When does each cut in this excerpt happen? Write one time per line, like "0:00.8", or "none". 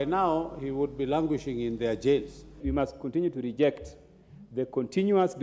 0:02.6